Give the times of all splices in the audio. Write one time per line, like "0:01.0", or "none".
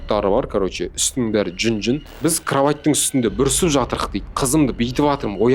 0:02.1